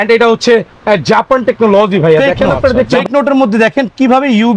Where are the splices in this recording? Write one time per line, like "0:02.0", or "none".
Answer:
0:02.9